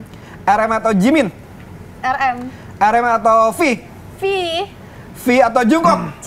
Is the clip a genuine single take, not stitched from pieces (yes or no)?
yes